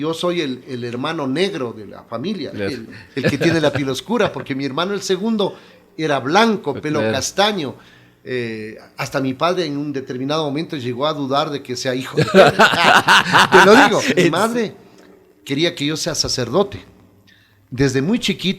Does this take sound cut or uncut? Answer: cut